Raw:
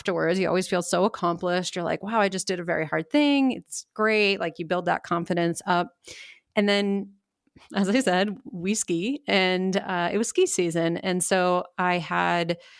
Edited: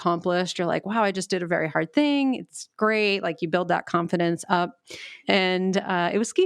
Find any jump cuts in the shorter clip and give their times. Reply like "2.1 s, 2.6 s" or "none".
5.2 s